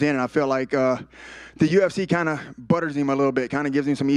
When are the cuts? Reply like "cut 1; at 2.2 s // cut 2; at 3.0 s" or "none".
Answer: none